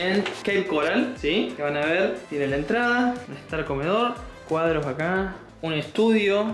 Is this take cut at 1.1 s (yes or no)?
no